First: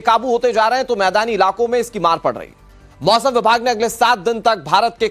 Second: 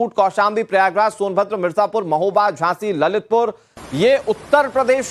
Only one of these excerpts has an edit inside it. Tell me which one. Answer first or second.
first